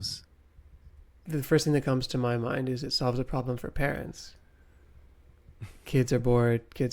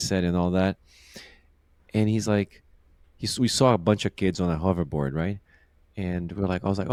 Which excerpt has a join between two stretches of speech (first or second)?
first